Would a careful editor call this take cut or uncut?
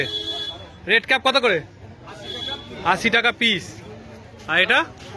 uncut